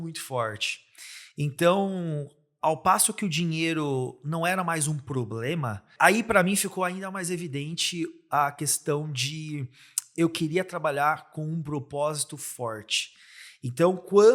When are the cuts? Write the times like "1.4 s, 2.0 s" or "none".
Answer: 5.9 s